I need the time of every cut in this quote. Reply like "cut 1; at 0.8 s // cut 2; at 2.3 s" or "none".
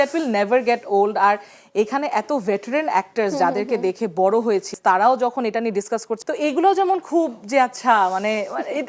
cut 1; at 4.7 s // cut 2; at 6.1 s